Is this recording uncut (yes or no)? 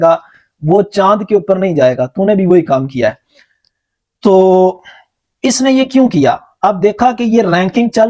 yes